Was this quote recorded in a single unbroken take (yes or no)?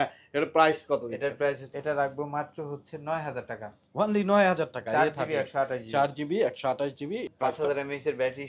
no